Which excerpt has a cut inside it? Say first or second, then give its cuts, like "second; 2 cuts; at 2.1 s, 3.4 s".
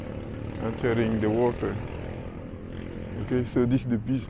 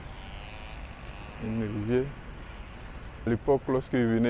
second; 1 cut; at 3.3 s